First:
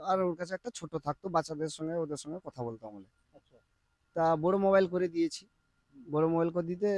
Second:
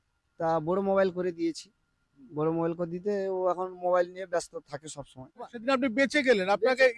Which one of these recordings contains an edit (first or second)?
second